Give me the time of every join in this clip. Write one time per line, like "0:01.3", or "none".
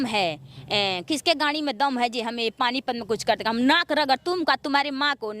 none